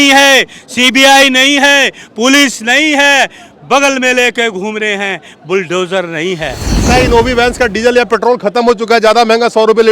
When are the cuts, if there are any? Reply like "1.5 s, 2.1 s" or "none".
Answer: 6.8 s